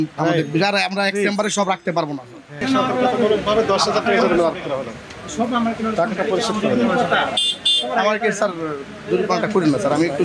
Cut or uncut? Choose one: cut